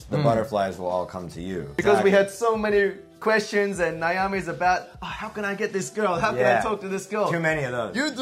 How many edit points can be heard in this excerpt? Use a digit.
1